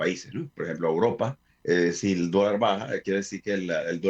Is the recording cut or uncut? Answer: cut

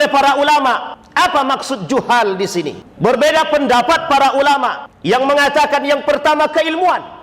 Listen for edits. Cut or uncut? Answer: cut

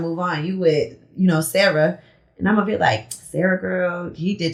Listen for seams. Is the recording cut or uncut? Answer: uncut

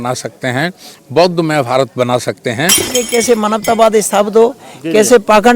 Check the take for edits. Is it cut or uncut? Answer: cut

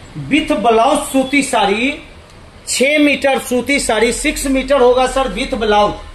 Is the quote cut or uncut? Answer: uncut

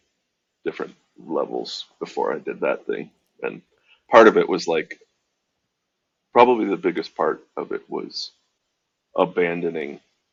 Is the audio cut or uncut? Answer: uncut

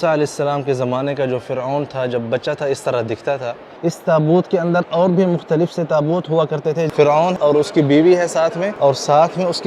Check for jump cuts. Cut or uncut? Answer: cut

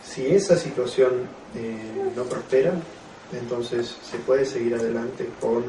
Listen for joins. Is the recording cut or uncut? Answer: cut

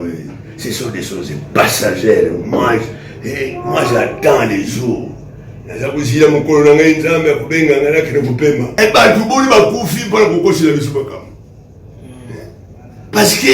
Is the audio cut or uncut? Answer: cut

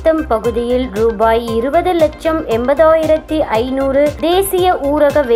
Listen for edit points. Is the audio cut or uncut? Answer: uncut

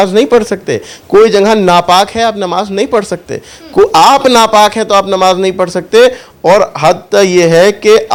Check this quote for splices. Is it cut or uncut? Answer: uncut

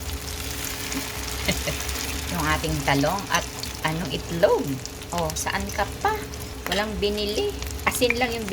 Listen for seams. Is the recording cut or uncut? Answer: cut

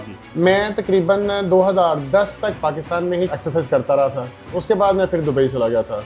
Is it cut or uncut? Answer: uncut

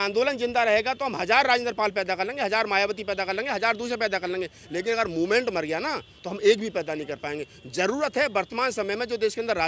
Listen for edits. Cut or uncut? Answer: uncut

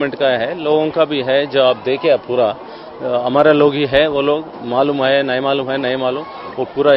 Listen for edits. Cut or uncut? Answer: uncut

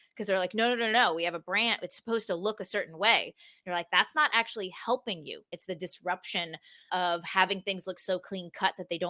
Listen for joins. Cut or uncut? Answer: cut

